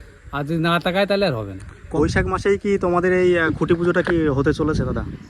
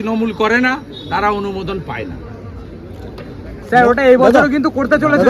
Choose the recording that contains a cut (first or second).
first